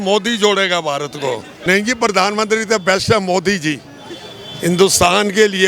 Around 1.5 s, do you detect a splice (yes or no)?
yes